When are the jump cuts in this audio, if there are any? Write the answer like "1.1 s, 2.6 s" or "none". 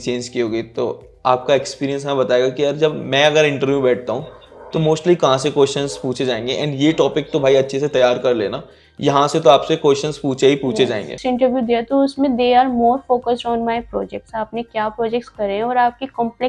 11.2 s